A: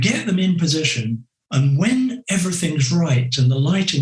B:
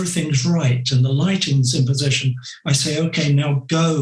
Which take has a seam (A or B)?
A